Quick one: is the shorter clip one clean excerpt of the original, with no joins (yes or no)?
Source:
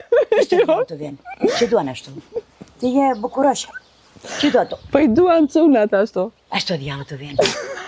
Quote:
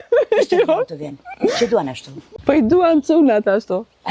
no